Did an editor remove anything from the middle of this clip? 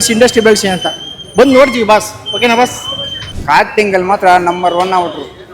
yes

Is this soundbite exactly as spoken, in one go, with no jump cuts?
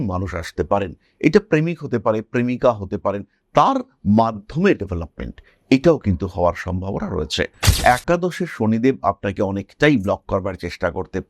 no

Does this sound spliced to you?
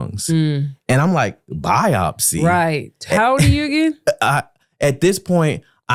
no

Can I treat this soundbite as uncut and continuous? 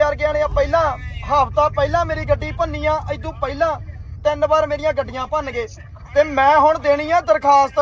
yes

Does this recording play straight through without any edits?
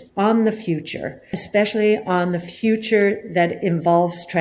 no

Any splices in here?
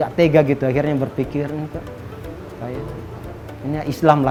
no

